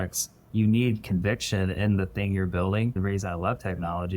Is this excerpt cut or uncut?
cut